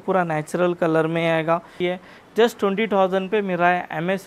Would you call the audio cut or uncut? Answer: cut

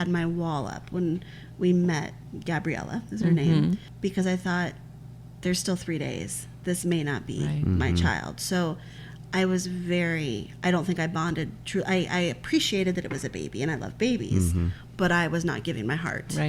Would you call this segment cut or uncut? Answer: uncut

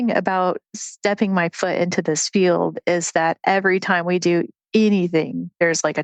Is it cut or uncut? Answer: uncut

